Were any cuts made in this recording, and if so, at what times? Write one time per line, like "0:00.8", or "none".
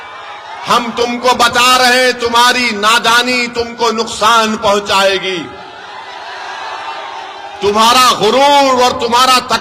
none